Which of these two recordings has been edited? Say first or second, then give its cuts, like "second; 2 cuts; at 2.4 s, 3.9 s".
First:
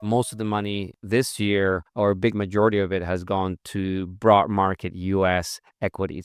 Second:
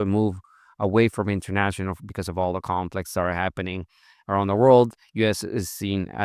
first; 2 cuts; at 0.9 s, 1.9 s